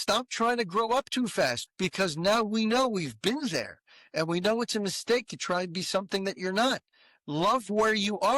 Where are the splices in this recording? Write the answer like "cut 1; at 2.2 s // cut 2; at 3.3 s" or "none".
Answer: cut 1; at 1.6 s